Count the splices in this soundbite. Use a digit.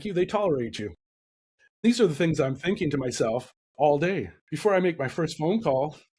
2